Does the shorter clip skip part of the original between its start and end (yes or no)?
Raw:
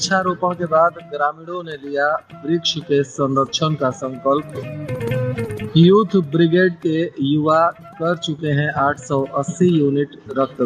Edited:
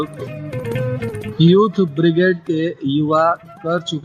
no